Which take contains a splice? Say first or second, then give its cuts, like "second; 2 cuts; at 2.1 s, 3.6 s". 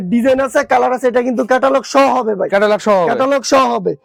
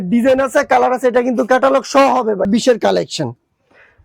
second; 1 cut; at 2.5 s